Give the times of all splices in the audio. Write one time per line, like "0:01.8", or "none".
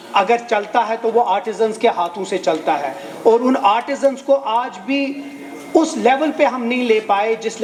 none